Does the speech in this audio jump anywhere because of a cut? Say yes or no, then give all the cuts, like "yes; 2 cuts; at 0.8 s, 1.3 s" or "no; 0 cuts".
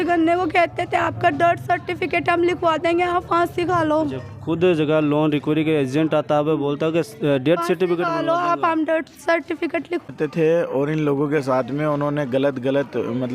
yes; 1 cut; at 10.1 s